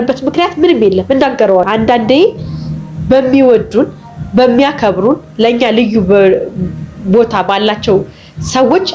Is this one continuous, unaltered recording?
no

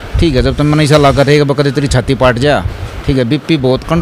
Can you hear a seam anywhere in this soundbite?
no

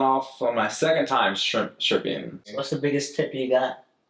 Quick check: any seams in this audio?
yes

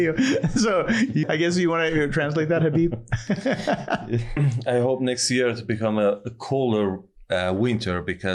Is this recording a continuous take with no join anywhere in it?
no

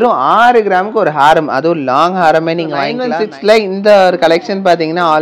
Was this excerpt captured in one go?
yes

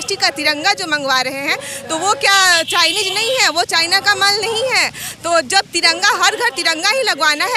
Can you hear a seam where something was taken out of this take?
no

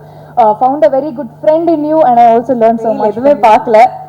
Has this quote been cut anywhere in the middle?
yes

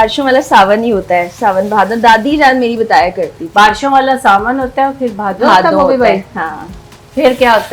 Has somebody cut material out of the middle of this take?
no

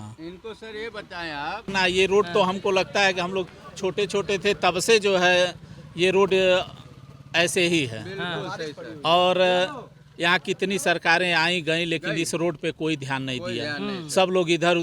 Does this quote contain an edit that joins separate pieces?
yes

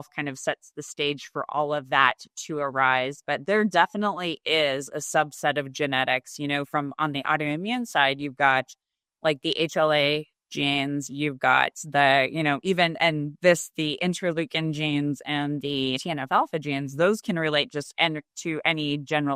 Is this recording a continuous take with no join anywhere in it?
yes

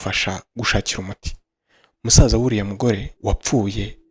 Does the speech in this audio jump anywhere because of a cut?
yes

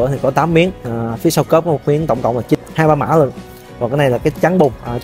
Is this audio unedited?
no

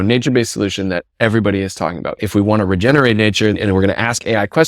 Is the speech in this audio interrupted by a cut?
yes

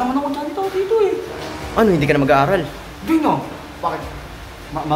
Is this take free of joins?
yes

